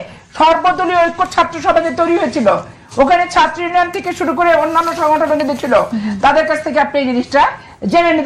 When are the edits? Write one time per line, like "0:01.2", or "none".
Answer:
none